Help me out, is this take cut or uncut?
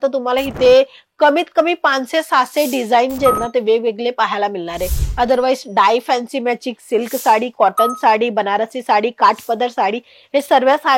uncut